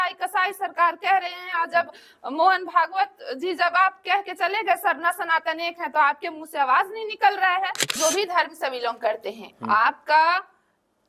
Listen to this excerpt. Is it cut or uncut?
cut